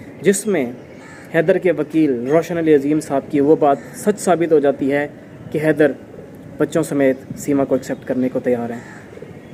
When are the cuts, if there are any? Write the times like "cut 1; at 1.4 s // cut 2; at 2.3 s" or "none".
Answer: none